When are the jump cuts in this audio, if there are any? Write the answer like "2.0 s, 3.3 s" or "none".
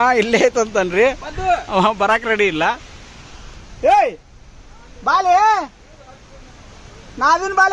none